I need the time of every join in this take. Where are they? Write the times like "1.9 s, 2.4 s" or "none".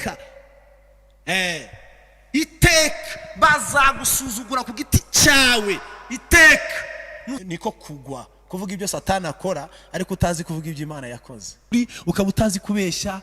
7.4 s, 11.7 s